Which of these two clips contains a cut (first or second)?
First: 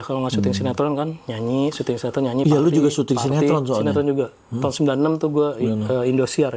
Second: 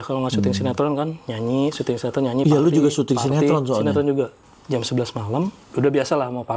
second